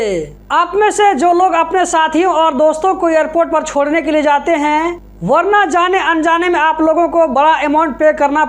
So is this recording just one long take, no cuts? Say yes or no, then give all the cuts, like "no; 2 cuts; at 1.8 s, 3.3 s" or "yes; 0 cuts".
no; 1 cut; at 5.1 s